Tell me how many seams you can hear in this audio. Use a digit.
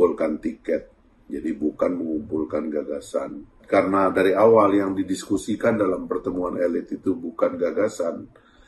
1